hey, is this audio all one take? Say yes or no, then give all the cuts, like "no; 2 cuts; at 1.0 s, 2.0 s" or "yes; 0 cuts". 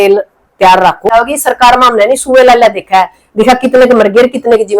no; 1 cut; at 1.1 s